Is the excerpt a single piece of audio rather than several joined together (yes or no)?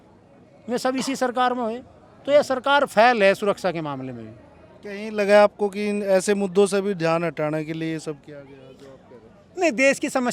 yes